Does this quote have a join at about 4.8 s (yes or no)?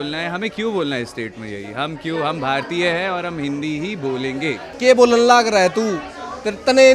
yes